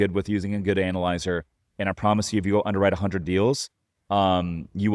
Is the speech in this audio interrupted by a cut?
no; 0 cuts

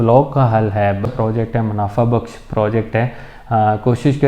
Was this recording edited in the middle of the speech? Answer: yes; 1 cut; at 1.0 s

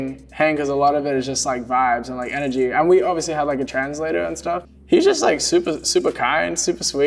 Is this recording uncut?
yes; 0 cuts

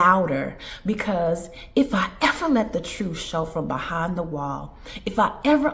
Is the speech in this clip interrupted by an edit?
no; 0 cuts

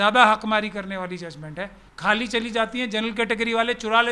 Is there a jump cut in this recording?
yes; 1 cut; at 1.8 s

